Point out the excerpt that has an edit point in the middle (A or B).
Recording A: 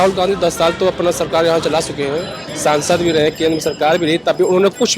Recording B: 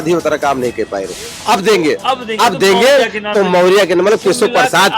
B